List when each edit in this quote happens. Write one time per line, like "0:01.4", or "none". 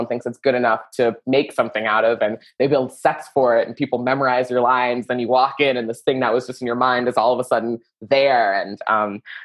none